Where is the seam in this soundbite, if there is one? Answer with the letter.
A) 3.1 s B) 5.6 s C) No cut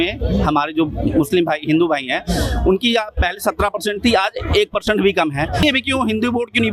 B